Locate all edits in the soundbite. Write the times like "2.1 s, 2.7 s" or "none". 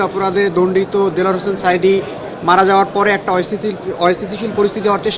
none